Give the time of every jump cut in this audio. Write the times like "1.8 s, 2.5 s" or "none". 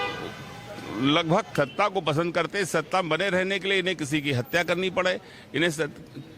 1.5 s